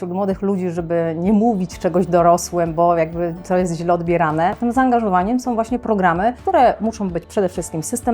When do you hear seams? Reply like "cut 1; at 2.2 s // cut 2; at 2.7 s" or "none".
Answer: cut 1; at 4.6 s